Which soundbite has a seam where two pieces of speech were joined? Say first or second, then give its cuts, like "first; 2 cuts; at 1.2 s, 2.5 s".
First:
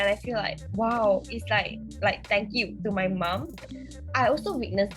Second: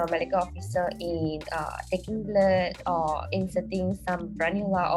first; 1 cut; at 3.7 s